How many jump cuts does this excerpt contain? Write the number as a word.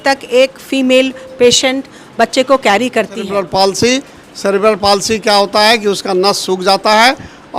one